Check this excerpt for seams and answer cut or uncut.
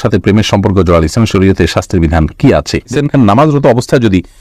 cut